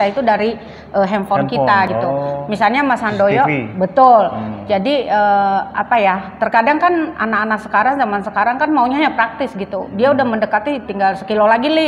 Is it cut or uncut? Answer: uncut